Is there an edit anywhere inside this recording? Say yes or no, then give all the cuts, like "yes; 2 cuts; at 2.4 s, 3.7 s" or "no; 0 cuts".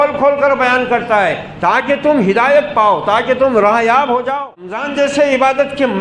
yes; 1 cut; at 4.9 s